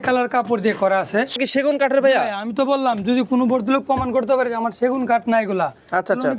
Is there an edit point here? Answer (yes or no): yes